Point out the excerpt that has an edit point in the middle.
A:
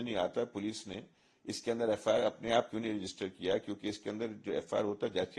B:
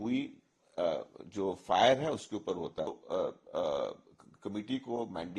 B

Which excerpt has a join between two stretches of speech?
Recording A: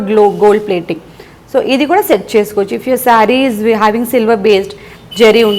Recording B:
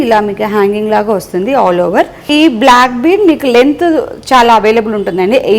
B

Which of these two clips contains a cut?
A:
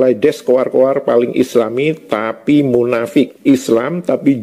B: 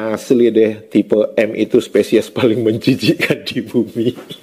A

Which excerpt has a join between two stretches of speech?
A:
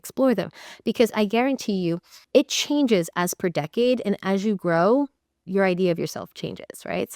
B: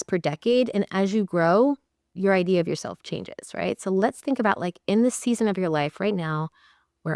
A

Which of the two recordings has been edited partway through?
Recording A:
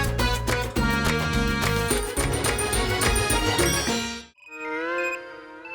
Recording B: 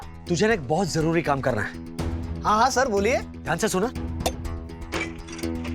A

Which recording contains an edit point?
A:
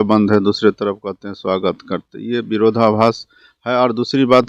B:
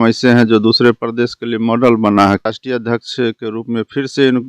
B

